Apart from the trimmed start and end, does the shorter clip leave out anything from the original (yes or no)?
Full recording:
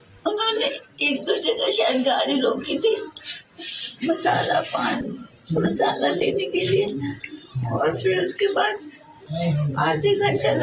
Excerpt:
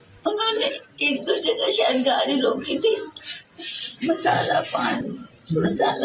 no